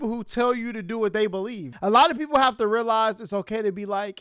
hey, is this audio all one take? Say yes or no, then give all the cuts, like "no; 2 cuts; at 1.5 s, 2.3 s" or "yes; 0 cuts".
no; 1 cut; at 1.7 s